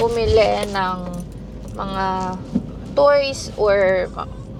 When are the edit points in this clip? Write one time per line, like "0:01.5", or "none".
none